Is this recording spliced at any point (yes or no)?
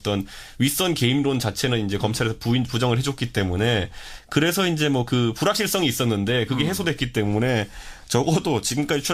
yes